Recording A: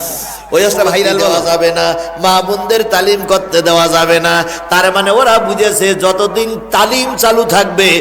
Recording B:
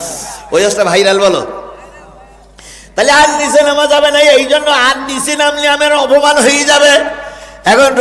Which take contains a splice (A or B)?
A